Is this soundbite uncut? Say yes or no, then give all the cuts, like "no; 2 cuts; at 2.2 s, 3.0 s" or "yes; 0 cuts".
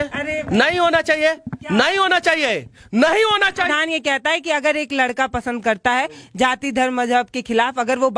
no; 1 cut; at 3.7 s